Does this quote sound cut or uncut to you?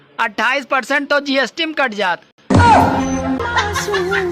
cut